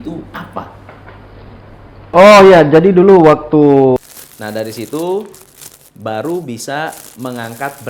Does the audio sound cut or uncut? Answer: cut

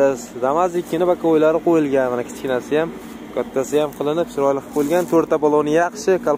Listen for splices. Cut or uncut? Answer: uncut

